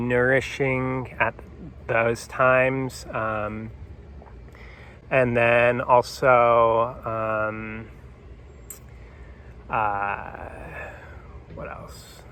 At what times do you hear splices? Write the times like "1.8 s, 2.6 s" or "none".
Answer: none